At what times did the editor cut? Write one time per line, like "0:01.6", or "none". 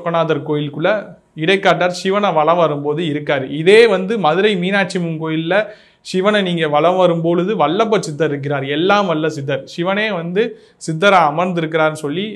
none